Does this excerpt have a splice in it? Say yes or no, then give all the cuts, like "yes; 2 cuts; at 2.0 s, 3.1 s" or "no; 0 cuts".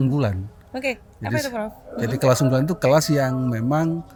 no; 0 cuts